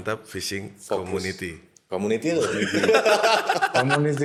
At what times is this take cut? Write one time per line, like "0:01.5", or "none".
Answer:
none